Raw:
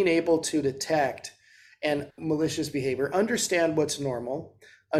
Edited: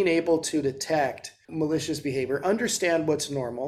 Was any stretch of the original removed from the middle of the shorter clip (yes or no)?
yes